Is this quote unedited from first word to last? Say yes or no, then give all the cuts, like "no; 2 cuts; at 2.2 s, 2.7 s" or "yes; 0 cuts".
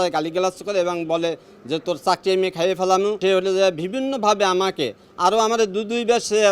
no; 1 cut; at 3.2 s